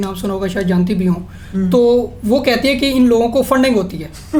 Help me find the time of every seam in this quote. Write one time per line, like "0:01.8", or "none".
none